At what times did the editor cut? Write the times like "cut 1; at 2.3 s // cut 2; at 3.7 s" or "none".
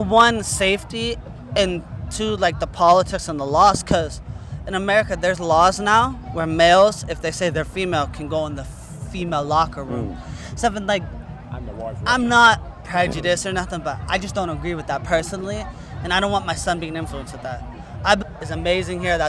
cut 1; at 18.2 s

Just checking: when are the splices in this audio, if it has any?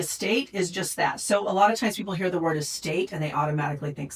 none

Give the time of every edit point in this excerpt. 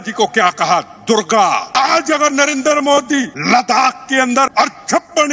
cut 1; at 1.7 s // cut 2; at 3.3 s // cut 3; at 4.5 s

